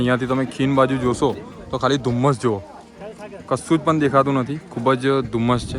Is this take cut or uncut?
uncut